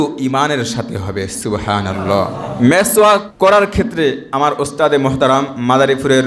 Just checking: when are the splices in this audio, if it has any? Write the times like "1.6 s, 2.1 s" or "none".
2.5 s, 3.3 s